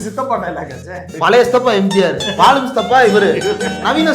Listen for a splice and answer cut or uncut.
cut